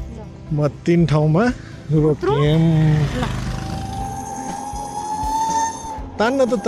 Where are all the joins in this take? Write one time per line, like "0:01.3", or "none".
0:03.9